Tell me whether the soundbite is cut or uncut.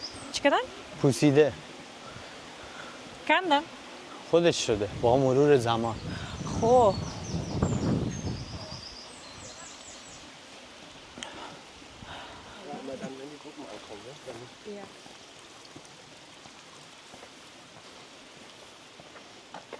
uncut